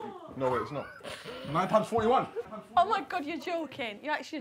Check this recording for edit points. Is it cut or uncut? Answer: cut